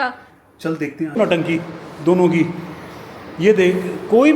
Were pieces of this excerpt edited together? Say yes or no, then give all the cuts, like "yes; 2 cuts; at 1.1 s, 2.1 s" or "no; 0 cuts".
yes; 1 cut; at 1.1 s